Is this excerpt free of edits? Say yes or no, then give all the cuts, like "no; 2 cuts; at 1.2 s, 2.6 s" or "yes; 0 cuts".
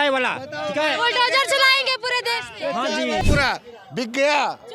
no; 1 cut; at 3.2 s